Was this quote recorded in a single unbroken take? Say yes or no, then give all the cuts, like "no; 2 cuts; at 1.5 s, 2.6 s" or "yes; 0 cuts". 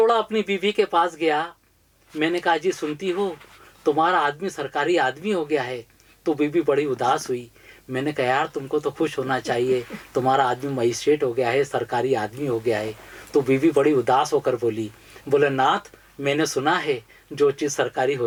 yes; 0 cuts